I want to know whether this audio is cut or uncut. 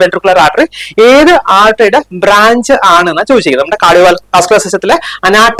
uncut